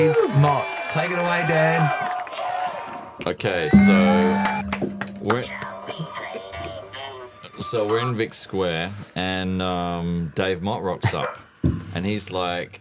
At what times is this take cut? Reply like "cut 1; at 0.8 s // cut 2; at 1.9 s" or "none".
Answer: none